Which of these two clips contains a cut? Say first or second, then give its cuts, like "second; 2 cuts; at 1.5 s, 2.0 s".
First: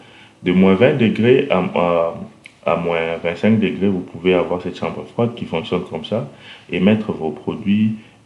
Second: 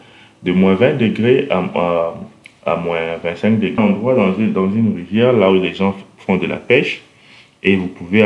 second; 1 cut; at 3.8 s